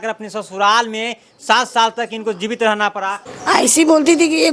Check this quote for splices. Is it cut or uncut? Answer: cut